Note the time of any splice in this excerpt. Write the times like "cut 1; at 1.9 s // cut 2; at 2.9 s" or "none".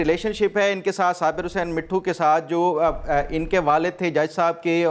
none